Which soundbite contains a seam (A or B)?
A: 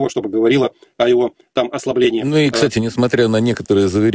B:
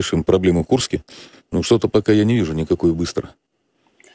A